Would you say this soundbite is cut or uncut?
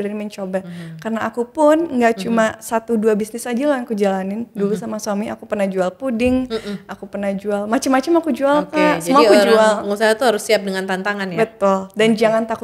uncut